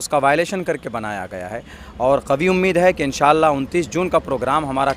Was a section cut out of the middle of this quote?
yes; 1 cut; at 1.8 s

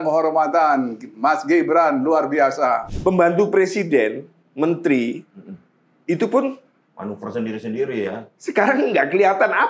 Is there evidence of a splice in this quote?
yes; 1 cut; at 2.9 s

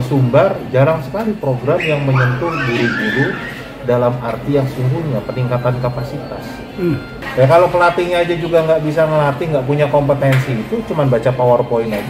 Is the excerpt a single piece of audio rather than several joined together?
no; 1 cut; at 7.2 s

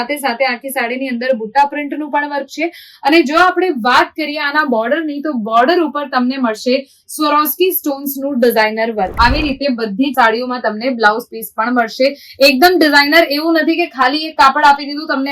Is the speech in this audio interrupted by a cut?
yes; 1 cut; at 9.1 s

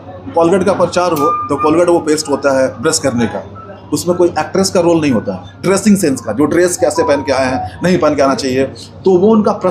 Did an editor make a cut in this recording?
yes; 1 cut; at 5.5 s

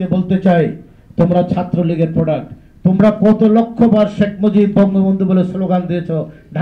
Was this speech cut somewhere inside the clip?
no; 0 cuts

